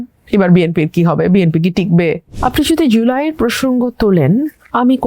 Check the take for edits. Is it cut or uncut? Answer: cut